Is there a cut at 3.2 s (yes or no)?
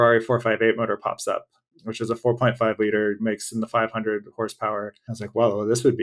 yes